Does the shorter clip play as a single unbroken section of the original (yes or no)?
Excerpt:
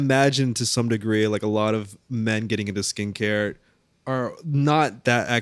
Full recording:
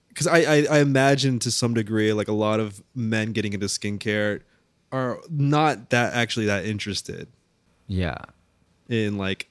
yes